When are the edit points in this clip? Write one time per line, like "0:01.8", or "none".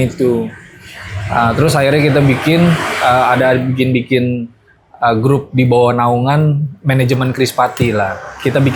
none